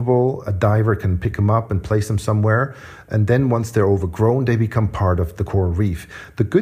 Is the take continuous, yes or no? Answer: no